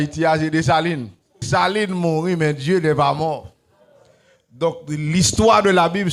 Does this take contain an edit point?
yes; 1 cut; at 1.5 s

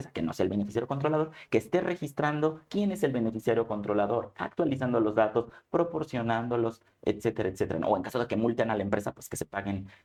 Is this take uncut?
yes; 0 cuts

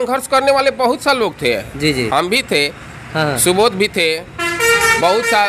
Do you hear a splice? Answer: no; 0 cuts

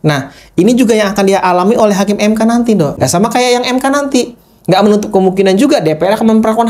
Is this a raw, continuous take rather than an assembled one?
no; 1 cut; at 2.9 s

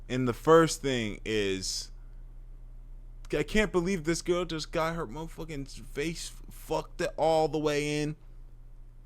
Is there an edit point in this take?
no; 0 cuts

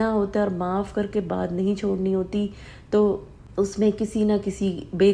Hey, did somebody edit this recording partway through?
no; 0 cuts

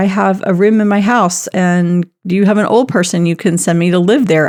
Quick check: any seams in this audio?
no; 0 cuts

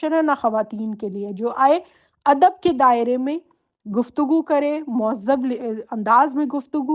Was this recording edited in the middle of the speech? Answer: no; 0 cuts

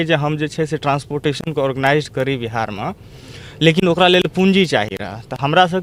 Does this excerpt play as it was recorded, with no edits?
yes; 0 cuts

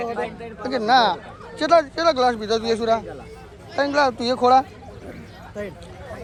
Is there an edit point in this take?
no; 0 cuts

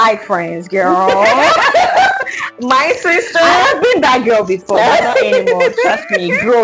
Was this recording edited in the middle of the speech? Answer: no; 0 cuts

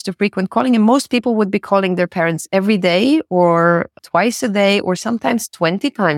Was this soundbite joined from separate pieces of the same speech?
no; 0 cuts

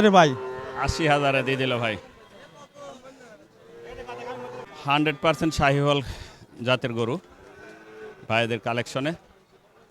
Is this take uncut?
no; 1 cut; at 4.7 s

